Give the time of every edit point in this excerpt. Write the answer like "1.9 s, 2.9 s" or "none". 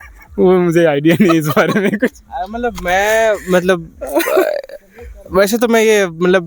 none

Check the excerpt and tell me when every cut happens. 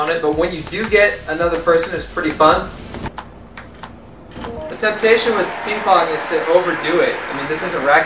3.1 s

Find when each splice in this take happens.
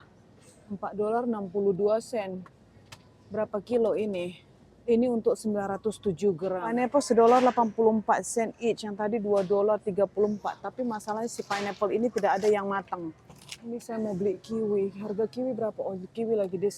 6.6 s, 13.8 s

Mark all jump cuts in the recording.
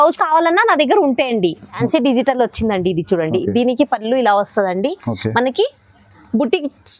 1.8 s

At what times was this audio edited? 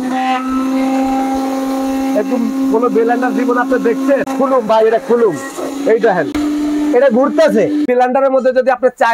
4.3 s, 6.3 s, 7.8 s

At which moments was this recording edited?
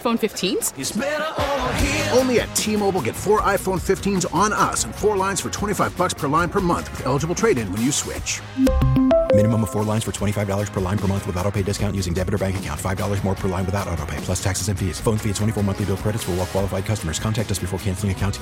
none

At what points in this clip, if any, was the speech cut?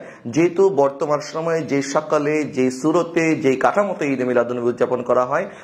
none

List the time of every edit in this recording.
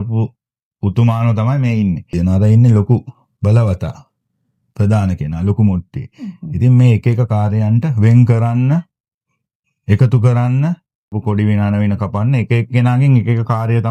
2.1 s, 3.2 s, 11.2 s

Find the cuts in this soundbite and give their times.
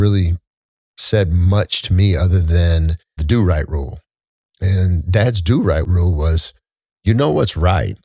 3.2 s, 5.9 s

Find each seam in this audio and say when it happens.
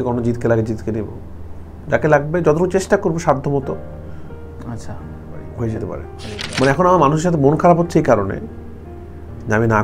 6.1 s

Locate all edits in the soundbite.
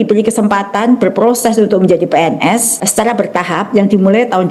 2.8 s

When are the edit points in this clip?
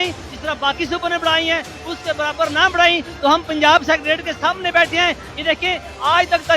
none

